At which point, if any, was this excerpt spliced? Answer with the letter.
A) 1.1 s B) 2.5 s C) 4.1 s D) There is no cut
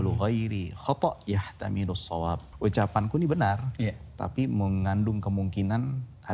B